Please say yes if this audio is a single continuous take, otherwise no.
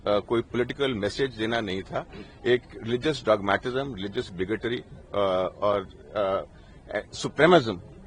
yes